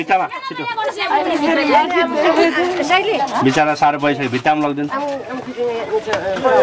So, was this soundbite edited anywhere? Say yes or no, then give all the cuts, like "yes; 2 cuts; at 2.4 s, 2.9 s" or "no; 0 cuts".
no; 0 cuts